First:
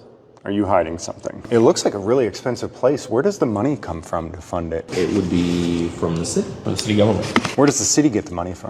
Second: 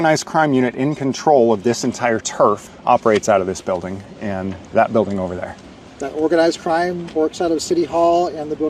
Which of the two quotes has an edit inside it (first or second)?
first